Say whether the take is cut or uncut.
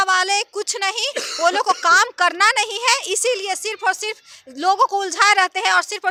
uncut